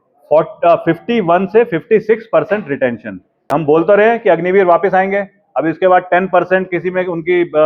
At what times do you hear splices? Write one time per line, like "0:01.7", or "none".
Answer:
0:03.5